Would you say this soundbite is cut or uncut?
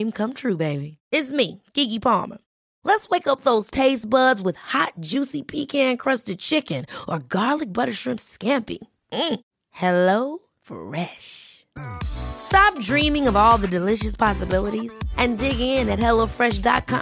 uncut